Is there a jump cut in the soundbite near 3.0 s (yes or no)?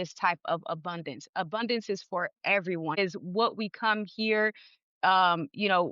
yes